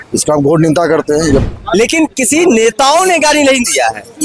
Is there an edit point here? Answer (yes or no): yes